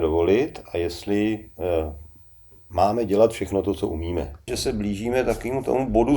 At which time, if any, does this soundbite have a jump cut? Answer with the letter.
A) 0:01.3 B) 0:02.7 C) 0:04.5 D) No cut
C